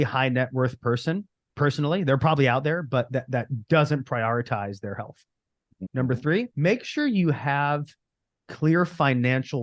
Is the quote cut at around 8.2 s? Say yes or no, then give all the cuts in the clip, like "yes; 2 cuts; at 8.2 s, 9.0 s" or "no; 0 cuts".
no; 2 cuts; at 5.9 s, 6.5 s